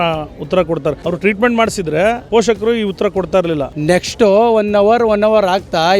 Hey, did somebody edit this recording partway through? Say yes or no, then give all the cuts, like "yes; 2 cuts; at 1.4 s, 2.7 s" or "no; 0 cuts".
yes; 3 cuts; at 1.0 s, 2.2 s, 3.7 s